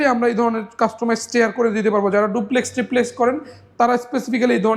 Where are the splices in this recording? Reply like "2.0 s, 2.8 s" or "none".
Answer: none